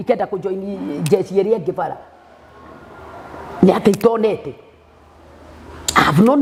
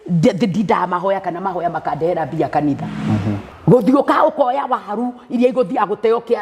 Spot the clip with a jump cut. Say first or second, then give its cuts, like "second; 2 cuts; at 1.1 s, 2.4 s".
second; 1 cut; at 3.5 s